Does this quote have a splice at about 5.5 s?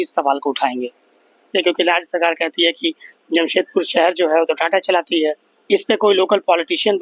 yes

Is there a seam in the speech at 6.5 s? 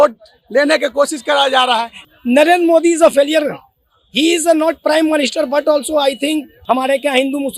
yes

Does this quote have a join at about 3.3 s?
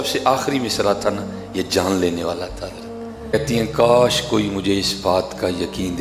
yes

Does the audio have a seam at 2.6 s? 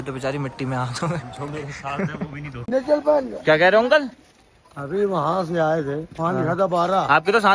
yes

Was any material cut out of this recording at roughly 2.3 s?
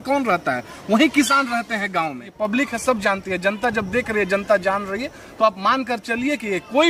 yes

